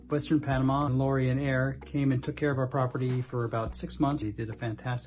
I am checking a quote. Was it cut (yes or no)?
yes